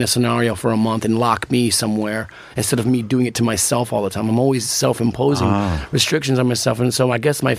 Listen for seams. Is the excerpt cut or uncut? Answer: uncut